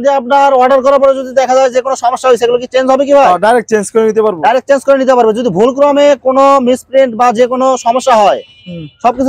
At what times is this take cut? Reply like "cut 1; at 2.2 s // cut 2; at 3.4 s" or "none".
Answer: none

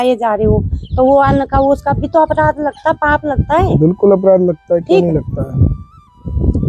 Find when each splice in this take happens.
none

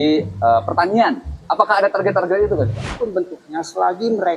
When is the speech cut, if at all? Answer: cut 1; at 1.3 s // cut 2; at 2.9 s

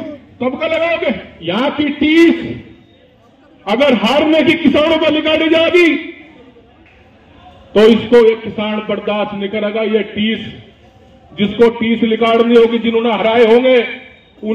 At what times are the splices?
cut 1; at 1.3 s

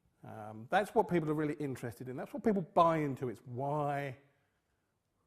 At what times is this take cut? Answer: cut 1; at 3.5 s

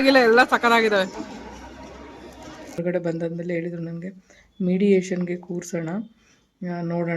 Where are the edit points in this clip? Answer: cut 1; at 2.8 s

